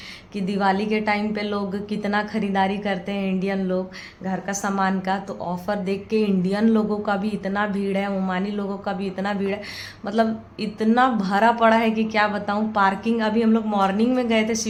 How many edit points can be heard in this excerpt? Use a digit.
0